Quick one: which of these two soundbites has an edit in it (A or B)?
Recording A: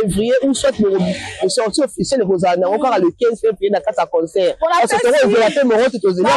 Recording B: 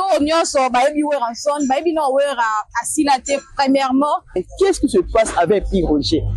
B